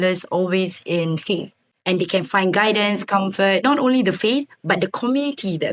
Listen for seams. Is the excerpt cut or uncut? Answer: uncut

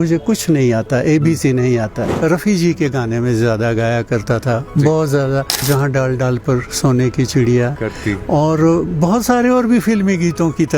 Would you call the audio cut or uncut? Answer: cut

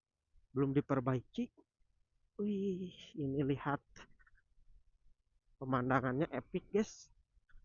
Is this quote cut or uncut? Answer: uncut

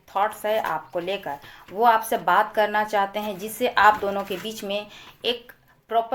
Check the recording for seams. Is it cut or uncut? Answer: uncut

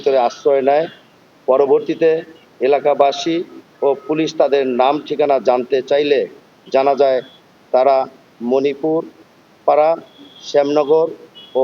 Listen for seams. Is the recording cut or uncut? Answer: uncut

